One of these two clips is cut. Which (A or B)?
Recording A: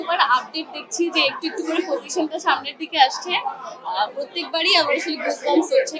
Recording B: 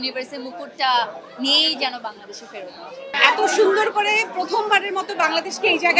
B